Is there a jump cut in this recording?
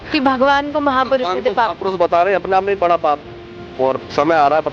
no; 0 cuts

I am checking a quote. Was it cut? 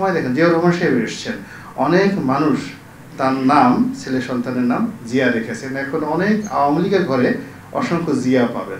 no; 0 cuts

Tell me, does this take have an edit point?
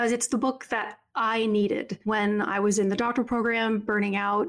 yes; 1 cut; at 1.9 s

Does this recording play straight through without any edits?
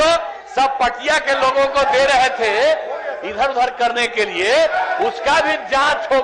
yes; 0 cuts

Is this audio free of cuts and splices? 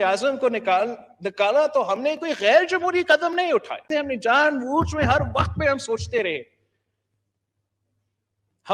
yes; 0 cuts

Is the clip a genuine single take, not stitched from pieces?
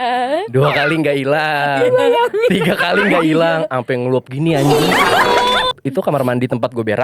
no; 1 cut; at 5.8 s

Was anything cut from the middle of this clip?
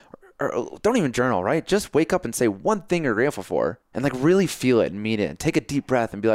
yes; 1 cut; at 3.8 s

